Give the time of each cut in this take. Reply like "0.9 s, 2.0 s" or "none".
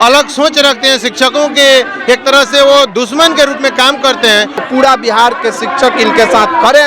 4.6 s